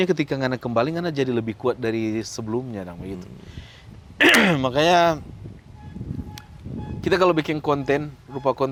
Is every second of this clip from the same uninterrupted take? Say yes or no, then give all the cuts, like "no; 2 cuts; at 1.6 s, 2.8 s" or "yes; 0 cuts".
yes; 0 cuts